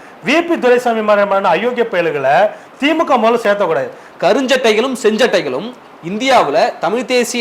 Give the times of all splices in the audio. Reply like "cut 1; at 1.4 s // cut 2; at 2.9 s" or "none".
cut 1; at 4.0 s